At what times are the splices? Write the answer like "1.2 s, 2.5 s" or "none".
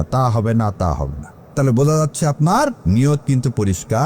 1.5 s, 2.8 s